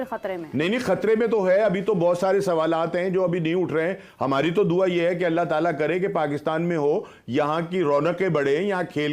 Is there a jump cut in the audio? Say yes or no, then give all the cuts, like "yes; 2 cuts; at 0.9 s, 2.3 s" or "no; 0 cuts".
no; 0 cuts